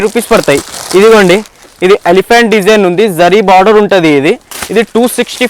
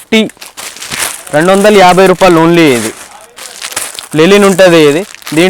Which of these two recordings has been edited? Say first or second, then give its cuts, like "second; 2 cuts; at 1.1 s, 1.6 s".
first; 1 cut; at 4.5 s